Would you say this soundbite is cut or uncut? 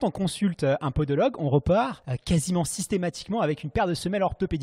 cut